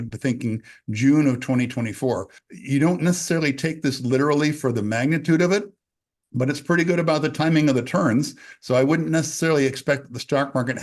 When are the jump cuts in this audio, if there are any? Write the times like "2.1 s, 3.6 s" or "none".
2.4 s